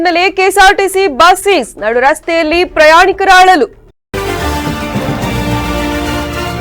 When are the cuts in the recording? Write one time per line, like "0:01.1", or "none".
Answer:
0:03.9